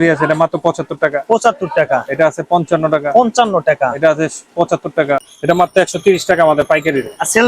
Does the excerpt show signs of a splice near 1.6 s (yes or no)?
no